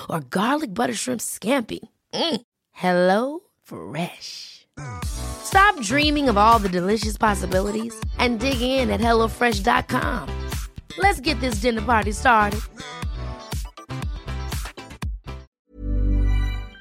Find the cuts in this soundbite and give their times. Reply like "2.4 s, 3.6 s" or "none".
15.5 s